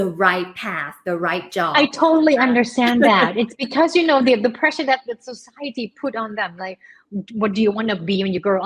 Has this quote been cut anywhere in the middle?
no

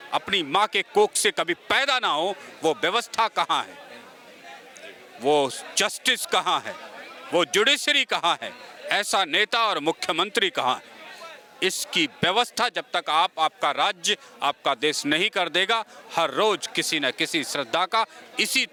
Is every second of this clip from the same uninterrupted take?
yes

